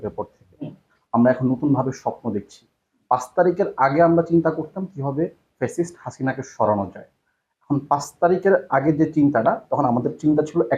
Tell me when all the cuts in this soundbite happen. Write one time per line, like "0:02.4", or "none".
none